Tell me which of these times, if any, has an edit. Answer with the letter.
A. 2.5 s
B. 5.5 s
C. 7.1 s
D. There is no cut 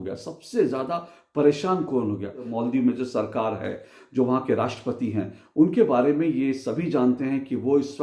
A